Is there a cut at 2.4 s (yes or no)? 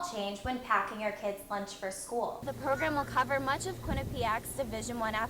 yes